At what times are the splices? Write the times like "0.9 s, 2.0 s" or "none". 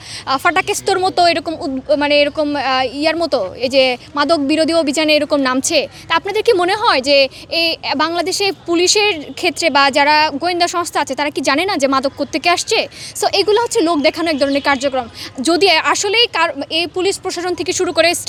none